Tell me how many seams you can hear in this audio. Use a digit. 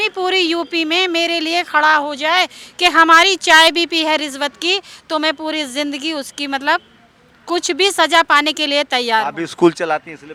0